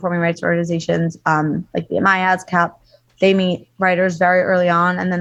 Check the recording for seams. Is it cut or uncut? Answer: uncut